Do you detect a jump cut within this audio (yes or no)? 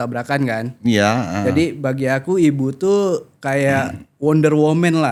no